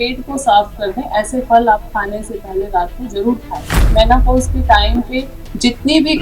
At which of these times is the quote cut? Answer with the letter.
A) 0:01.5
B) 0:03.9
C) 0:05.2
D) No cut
B